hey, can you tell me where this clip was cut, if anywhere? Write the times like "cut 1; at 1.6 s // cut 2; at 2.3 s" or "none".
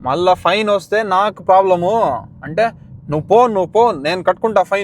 none